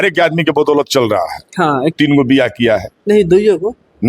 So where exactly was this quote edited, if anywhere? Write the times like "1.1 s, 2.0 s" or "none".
1.9 s